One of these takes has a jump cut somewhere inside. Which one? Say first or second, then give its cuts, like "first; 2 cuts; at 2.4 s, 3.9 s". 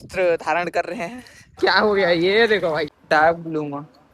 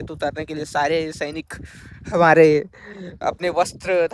first; 2 cuts; at 1.6 s, 2.9 s